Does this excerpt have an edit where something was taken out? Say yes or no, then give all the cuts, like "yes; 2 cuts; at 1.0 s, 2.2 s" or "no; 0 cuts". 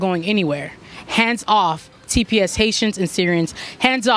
no; 0 cuts